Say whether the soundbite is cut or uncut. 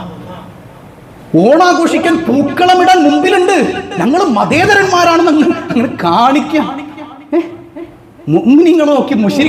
uncut